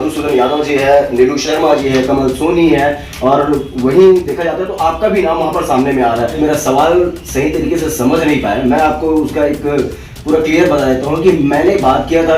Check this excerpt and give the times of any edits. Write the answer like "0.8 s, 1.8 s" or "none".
6.4 s